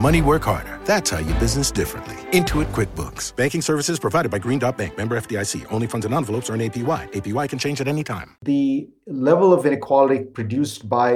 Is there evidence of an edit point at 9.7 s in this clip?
yes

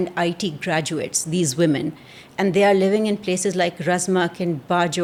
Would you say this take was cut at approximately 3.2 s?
no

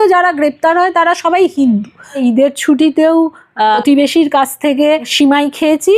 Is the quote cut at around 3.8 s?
yes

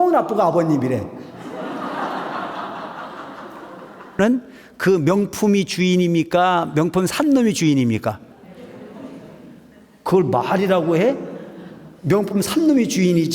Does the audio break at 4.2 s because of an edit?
yes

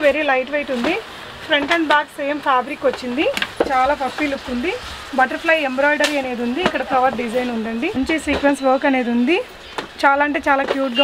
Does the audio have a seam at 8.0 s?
yes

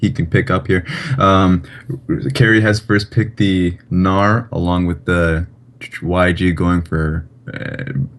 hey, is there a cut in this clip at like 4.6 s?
no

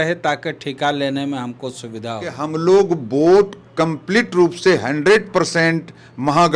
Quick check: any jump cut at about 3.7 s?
no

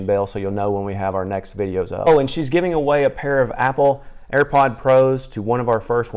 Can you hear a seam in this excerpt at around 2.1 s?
yes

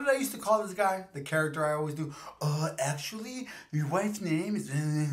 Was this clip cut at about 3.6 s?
no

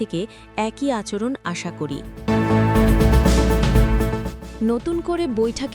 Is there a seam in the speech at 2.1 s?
yes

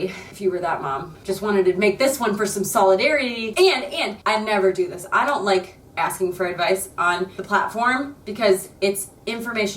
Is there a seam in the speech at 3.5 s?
yes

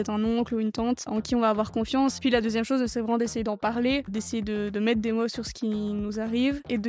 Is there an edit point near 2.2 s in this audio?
yes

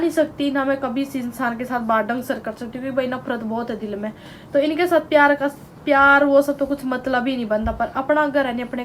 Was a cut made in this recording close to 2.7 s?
no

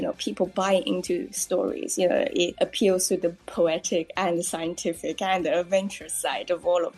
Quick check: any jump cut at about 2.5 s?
yes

